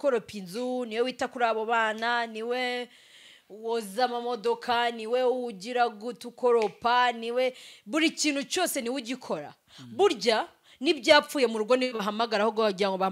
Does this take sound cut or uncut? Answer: uncut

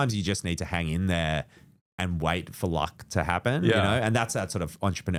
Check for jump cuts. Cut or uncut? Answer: uncut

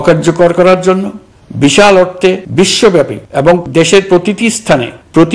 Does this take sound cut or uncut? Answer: uncut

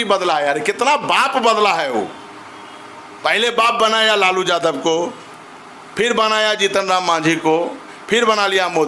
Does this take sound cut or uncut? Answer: uncut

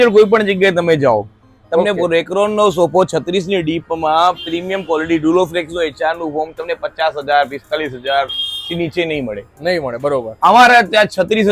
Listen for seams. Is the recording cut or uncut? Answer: uncut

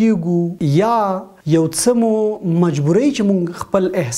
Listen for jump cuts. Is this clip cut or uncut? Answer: cut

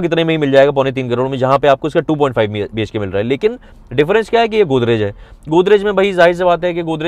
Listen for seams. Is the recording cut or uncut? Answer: uncut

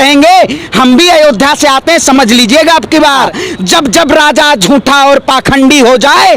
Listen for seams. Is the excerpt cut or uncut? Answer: cut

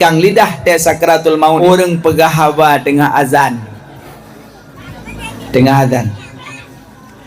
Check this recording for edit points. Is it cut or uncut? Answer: cut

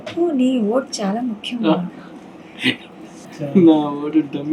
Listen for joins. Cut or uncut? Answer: cut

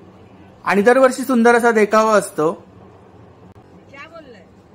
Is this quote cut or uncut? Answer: cut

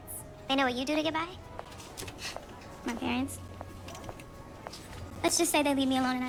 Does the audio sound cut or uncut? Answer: uncut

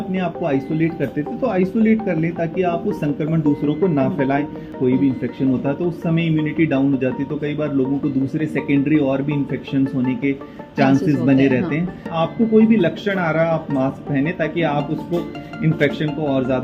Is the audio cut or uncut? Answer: cut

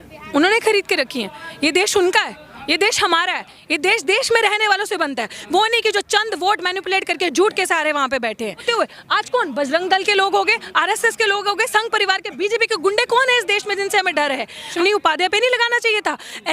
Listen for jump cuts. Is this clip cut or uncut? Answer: cut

